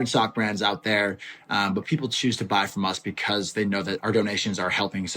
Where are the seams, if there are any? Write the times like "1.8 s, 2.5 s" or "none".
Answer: 4.0 s